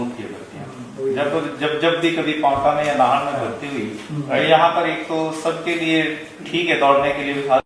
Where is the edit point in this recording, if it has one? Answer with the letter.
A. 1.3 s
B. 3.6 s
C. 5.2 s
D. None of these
D